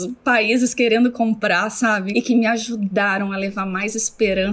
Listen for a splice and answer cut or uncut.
cut